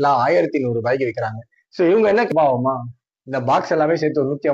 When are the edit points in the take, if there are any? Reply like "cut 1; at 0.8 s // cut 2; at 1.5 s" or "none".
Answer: cut 1; at 2.3 s